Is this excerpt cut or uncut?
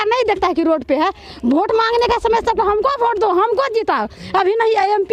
uncut